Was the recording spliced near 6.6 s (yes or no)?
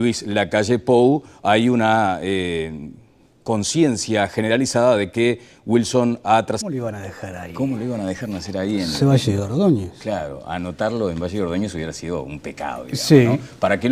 no